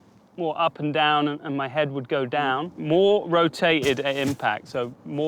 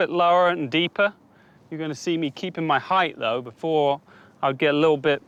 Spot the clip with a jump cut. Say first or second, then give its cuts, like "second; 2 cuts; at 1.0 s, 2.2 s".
first; 1 cut; at 2.7 s